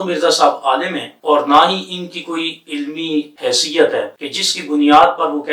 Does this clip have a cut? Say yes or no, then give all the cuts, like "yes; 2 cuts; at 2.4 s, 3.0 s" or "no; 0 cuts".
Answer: no; 0 cuts